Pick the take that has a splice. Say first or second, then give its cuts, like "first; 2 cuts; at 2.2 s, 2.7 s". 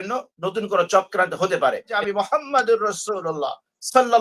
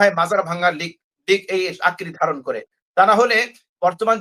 first; 1 cut; at 2.0 s